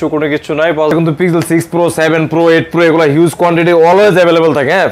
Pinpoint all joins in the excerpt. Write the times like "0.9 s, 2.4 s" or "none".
0.9 s